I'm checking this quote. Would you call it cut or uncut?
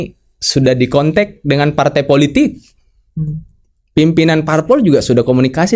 uncut